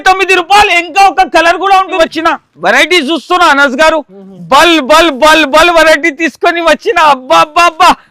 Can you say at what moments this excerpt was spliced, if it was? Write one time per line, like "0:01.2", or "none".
0:01.9